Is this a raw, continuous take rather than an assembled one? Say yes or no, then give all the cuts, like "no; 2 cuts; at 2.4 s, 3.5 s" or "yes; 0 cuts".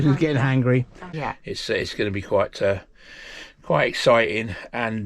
no; 1 cut; at 1.1 s